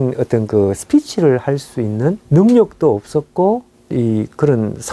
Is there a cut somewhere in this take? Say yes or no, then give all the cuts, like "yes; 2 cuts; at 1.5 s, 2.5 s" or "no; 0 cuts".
yes; 2 cuts; at 2.2 s, 3.8 s